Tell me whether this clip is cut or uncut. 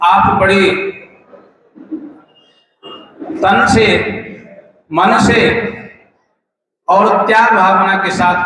uncut